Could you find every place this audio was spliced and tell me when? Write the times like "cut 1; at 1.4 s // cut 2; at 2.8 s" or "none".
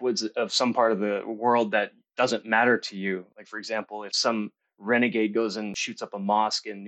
cut 1; at 4.2 s // cut 2; at 5.8 s